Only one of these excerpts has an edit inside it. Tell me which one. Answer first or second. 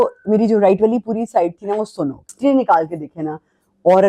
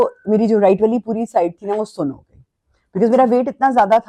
first